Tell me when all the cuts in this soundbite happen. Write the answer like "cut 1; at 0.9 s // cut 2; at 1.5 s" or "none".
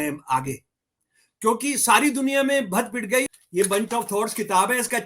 cut 1; at 3.2 s